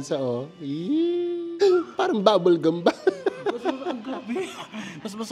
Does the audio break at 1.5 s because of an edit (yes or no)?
yes